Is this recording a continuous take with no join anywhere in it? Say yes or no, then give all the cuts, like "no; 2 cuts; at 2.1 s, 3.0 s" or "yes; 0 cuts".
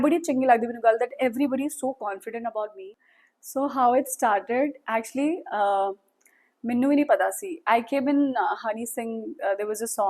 no; 1 cut; at 2.8 s